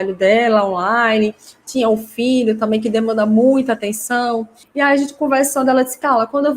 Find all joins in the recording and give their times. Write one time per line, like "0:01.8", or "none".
0:04.6